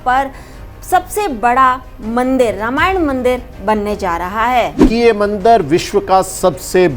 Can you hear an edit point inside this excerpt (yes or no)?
yes